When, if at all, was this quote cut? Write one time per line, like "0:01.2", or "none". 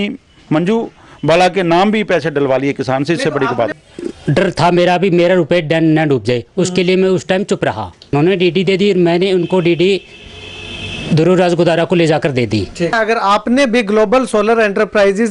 0:03.8
0:08.1
0:13.0